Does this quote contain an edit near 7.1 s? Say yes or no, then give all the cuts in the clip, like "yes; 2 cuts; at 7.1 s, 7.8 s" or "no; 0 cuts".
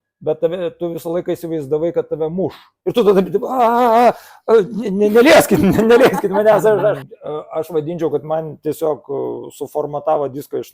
yes; 2 cuts; at 2.7 s, 7.1 s